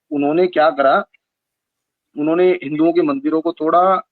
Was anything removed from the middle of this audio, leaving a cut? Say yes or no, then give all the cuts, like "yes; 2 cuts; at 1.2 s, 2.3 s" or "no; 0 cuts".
no; 0 cuts